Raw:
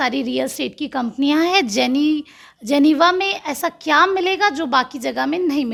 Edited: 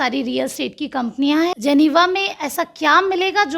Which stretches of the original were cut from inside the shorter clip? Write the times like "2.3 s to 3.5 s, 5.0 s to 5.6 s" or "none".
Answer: 1.5 s to 2.6 s